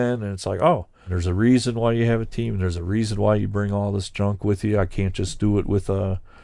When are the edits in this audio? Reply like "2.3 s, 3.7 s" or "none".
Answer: 1.2 s